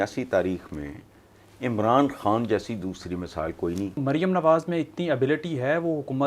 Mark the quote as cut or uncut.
cut